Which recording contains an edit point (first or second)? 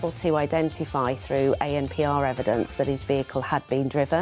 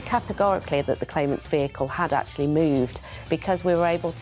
second